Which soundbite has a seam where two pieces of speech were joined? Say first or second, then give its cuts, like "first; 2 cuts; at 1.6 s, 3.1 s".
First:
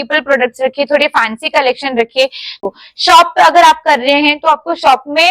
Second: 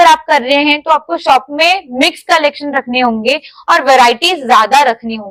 first; 1 cut; at 2.6 s